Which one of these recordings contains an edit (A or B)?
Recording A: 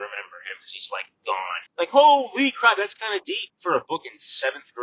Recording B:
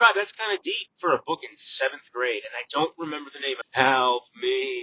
B